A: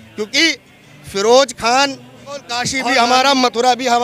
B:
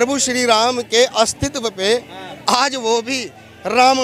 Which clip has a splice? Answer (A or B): A